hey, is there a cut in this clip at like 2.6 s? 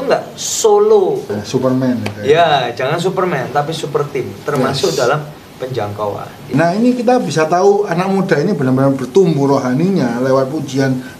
no; 2 cuts; at 1.4 s, 6.5 s

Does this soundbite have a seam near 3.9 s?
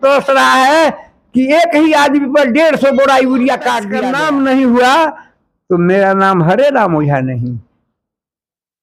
yes; 1 cut; at 3.9 s

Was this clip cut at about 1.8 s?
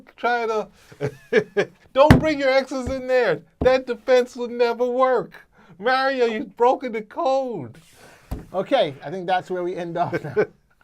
yes; 1 cut; at 1.8 s

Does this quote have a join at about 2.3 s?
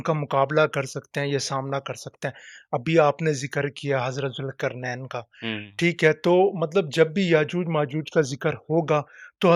no; 0 cuts

